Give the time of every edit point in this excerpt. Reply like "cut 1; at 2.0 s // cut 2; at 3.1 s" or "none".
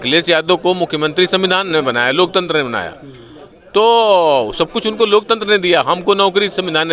none

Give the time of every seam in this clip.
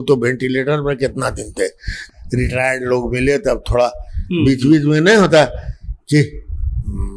cut 1; at 1.9 s

